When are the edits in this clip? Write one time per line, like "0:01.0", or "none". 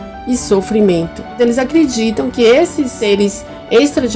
0:01.3
0:03.0

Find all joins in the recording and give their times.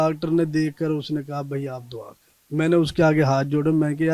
none

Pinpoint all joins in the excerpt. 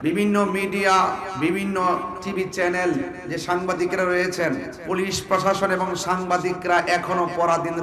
0:01.3
0:02.2
0:04.7

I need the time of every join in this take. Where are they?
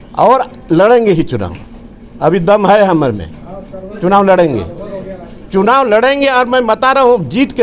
none

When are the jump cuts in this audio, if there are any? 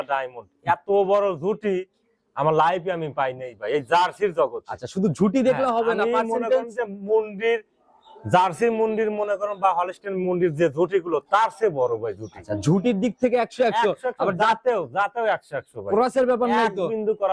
none

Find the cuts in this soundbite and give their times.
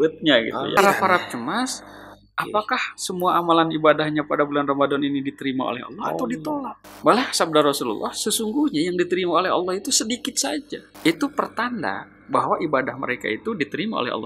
0:00.8
0:06.8
0:10.8

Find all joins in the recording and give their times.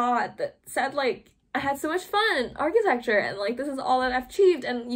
none

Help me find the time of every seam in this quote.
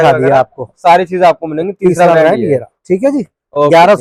none

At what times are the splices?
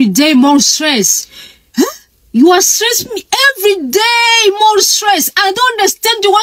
none

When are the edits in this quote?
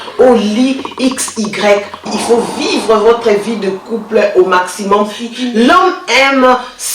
0:02.0
0:05.2

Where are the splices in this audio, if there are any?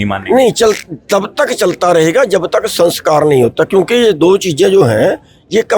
none

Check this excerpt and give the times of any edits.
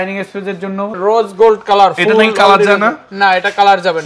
0:01.0

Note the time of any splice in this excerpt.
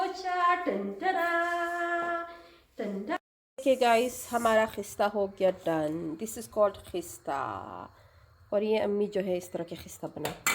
0:03.2

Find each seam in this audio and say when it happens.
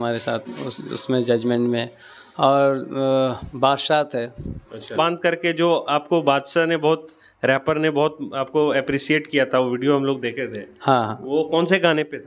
0:04.9

